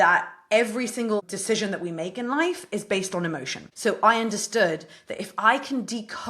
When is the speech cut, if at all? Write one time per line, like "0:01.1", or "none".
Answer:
0:01.3
0:03.7